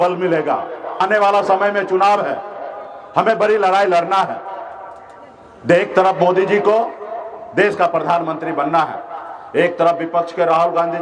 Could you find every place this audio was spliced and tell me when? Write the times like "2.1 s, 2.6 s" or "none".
1.0 s